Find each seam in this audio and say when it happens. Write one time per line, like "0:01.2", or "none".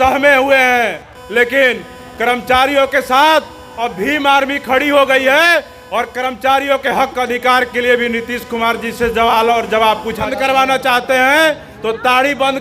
0:10.2